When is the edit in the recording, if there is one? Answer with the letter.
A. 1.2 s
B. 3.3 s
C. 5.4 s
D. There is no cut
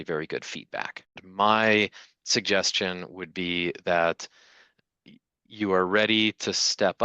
A